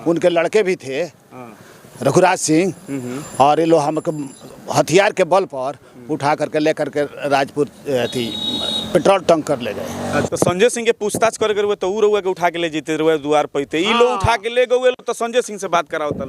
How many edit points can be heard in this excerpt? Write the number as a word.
one